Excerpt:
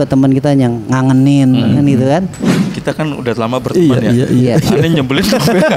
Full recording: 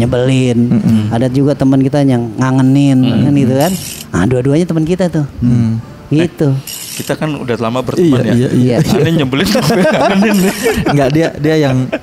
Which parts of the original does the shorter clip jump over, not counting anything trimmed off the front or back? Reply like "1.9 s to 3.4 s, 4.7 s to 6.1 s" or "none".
4.0 s to 6.7 s